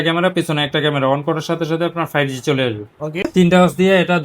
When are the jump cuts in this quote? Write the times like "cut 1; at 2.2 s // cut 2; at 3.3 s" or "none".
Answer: cut 1; at 3.3 s

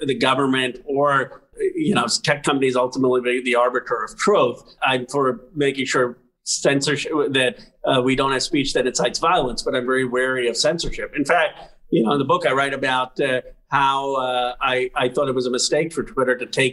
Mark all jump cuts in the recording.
cut 1; at 1.5 s // cut 2; at 4.8 s

